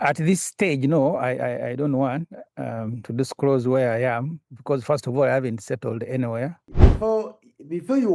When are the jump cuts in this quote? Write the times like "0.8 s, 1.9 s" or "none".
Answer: 6.6 s